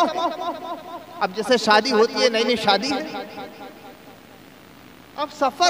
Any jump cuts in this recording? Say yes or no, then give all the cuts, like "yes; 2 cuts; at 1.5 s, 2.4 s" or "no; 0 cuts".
no; 0 cuts